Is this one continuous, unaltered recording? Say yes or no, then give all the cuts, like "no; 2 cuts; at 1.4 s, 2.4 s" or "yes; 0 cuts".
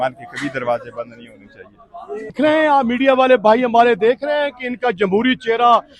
yes; 0 cuts